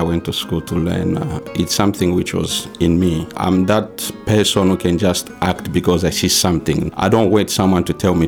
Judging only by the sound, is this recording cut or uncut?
cut